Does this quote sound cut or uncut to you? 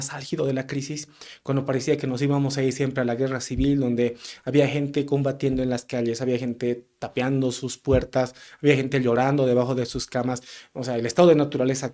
uncut